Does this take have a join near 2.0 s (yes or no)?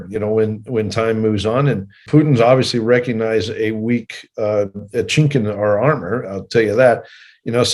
yes